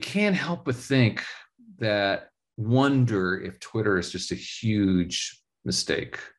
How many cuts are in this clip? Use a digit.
0